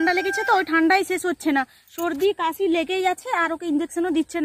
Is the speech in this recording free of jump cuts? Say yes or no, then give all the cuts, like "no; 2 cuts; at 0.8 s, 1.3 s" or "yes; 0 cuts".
yes; 0 cuts